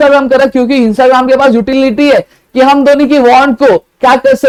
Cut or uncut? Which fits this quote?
uncut